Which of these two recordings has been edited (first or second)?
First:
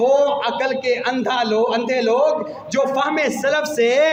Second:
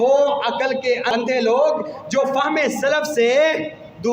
second